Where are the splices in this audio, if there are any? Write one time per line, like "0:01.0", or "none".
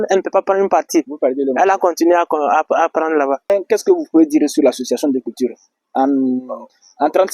0:03.5